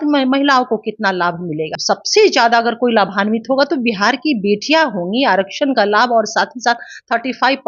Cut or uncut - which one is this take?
cut